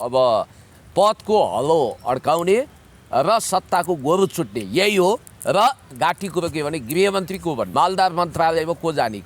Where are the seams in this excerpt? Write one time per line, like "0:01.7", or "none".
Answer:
0:05.9
0:07.7